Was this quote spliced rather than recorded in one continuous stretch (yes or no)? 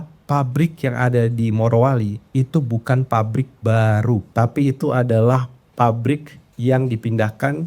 yes